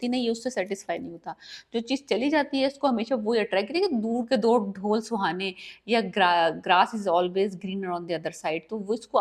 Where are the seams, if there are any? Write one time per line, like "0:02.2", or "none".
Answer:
none